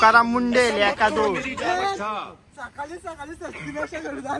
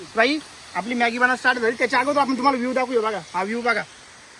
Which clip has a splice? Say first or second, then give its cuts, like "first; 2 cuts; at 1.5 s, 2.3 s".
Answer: first; 1 cut; at 2.1 s